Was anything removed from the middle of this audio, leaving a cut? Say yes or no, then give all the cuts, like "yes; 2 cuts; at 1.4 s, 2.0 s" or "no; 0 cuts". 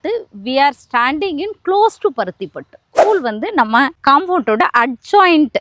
yes; 1 cut; at 2.9 s